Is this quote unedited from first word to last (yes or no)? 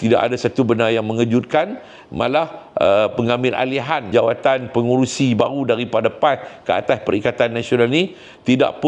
yes